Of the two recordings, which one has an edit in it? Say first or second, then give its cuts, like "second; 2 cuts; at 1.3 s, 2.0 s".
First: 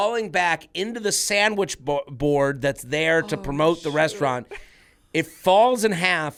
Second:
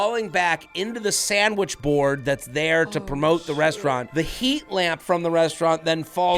second; 2 cuts; at 1.8 s, 4.0 s